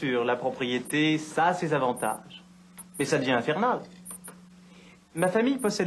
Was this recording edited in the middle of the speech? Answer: no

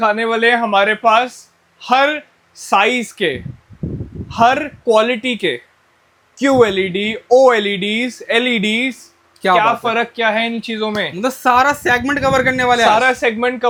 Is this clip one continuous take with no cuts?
yes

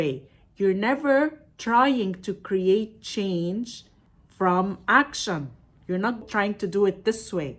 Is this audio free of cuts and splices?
no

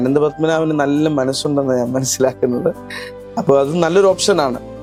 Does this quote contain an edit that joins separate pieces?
no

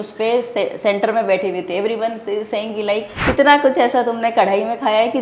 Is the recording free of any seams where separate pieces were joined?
no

